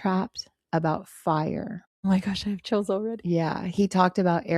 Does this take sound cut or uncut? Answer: cut